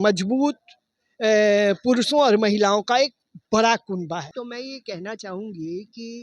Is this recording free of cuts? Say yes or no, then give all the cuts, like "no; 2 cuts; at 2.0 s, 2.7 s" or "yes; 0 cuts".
no; 1 cut; at 4.3 s